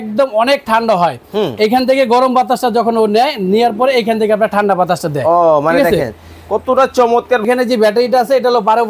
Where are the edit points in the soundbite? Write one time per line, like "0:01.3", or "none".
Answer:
0:07.4